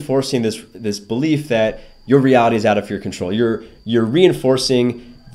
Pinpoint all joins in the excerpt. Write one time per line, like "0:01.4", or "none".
none